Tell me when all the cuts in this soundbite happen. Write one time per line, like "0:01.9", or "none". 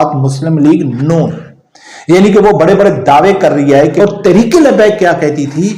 0:03.9